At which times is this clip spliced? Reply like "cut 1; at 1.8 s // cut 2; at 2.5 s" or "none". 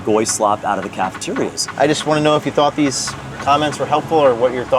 cut 1; at 1.7 s